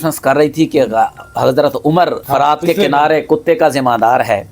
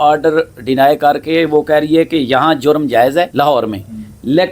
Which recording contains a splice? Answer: first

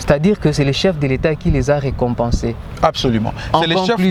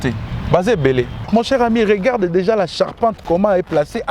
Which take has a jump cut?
second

